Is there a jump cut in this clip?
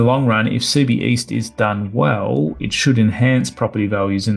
no; 0 cuts

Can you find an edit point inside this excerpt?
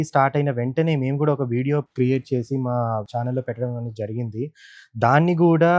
no; 0 cuts

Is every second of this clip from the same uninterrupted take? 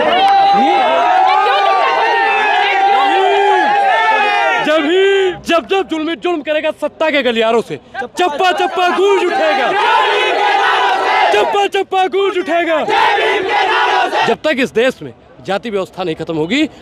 no; 2 cuts; at 5.3 s, 14.3 s

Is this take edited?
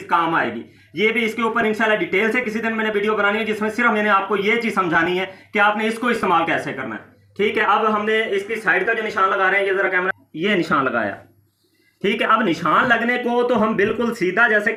no; 0 cuts

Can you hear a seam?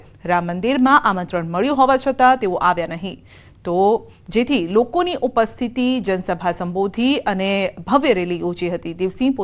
yes; 1 cut; at 0.9 s

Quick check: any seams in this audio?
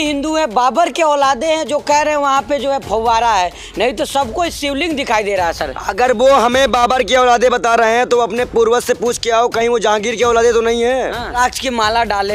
yes; 1 cut; at 11.4 s

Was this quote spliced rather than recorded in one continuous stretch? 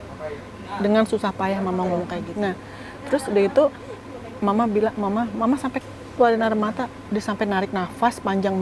yes; 1 cut; at 2.2 s

